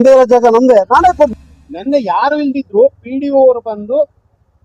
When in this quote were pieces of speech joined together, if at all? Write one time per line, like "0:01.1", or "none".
0:01.3